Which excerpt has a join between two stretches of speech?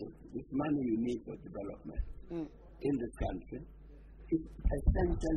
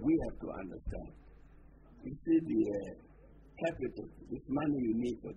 first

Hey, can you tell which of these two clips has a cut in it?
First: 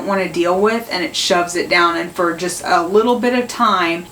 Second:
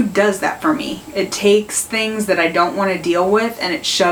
first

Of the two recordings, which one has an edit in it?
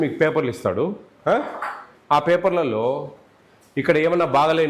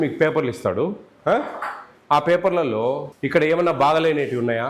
second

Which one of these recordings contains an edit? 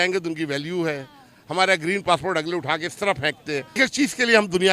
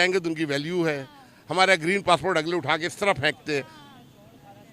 first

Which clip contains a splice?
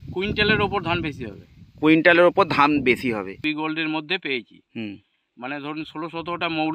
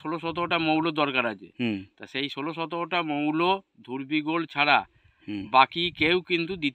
first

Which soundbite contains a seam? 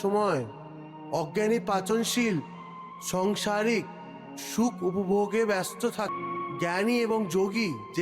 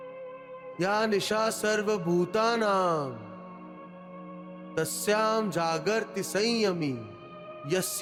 first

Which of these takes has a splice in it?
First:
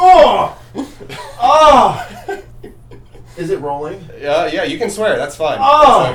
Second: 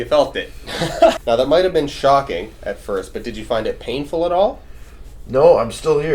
second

